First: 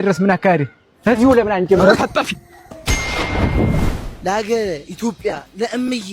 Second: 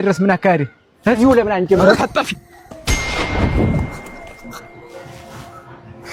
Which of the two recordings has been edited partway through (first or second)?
first